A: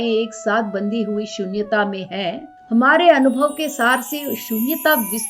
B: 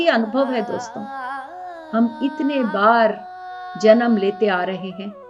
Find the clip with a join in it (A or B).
A